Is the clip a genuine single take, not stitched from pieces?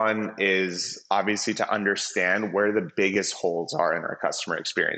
yes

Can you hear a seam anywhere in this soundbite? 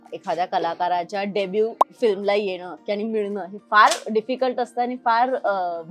no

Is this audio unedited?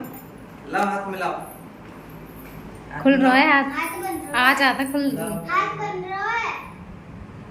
yes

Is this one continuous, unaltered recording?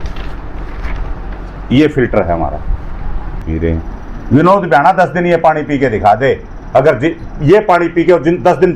no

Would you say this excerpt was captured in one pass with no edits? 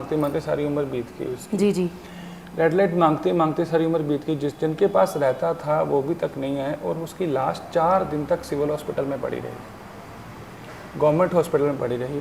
yes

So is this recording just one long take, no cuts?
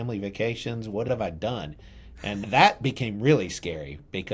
no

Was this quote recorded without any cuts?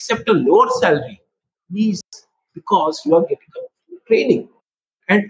yes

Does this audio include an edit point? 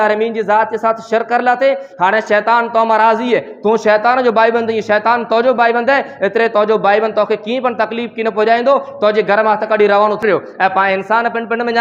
yes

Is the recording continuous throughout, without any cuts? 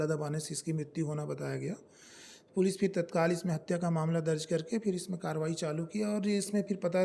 yes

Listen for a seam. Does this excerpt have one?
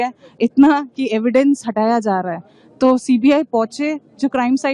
yes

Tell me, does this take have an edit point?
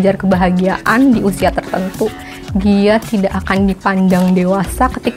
no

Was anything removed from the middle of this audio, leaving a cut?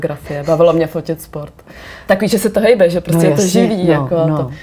no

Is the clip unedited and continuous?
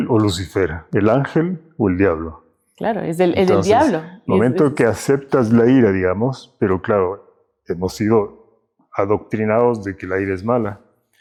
yes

